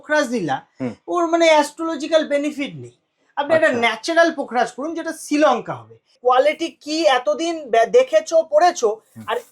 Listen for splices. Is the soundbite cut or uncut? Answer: cut